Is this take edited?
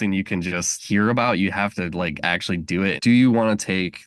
yes; 1 cut; at 3.0 s

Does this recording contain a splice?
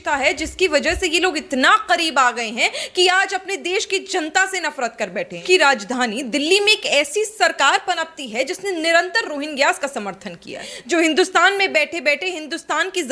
yes; 2 cuts; at 5.4 s, 10.7 s

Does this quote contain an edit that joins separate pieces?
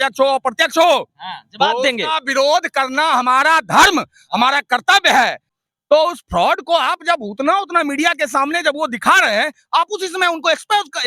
yes; 1 cut; at 5.5 s

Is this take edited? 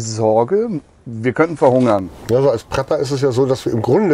yes; 1 cut; at 2.1 s

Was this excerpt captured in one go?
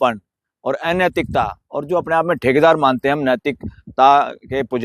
yes; 0 cuts

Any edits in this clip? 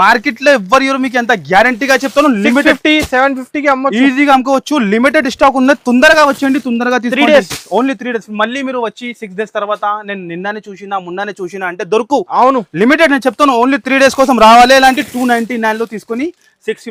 no; 0 cuts

